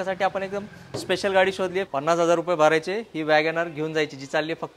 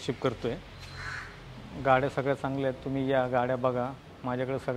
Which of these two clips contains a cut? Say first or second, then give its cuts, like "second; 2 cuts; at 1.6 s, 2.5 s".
first; 1 cut; at 1.9 s